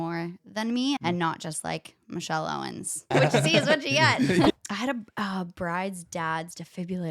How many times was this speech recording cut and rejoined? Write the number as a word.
three